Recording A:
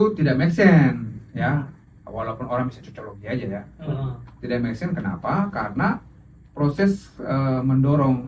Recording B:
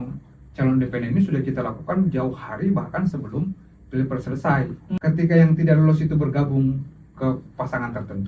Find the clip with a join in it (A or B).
B